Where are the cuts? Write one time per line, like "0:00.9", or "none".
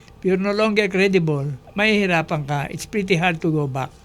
0:01.6